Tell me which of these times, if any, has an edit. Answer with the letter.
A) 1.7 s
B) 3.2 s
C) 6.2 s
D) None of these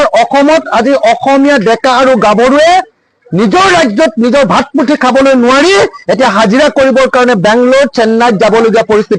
D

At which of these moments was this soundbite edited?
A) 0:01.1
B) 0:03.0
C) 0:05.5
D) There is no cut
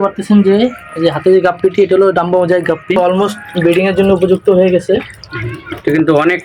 B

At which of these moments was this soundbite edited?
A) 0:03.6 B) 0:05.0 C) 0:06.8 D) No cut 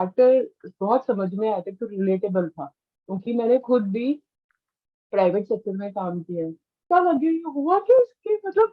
C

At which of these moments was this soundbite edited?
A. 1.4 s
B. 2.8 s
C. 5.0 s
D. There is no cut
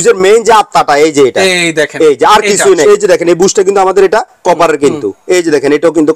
B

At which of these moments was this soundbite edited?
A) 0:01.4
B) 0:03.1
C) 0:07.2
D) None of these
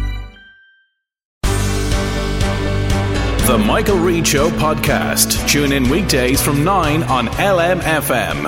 A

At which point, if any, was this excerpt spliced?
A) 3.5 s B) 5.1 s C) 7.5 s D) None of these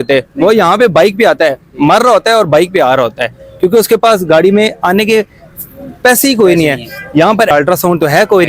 C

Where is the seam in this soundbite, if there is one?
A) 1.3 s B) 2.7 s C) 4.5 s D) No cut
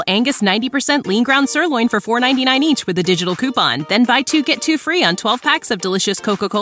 D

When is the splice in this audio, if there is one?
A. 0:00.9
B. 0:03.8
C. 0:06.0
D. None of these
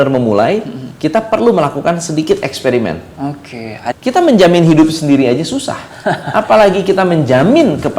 B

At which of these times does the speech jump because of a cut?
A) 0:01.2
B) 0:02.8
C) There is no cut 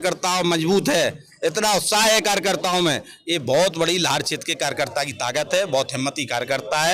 C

